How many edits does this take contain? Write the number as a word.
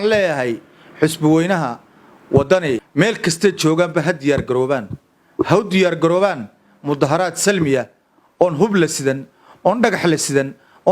one